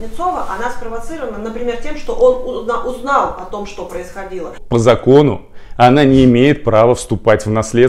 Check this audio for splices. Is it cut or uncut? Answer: cut